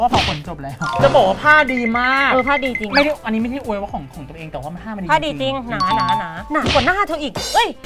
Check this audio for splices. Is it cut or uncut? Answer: uncut